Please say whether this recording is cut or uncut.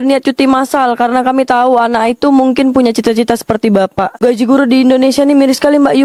uncut